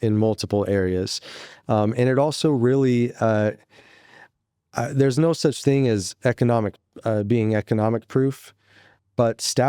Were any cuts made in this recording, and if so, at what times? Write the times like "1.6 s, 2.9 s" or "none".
none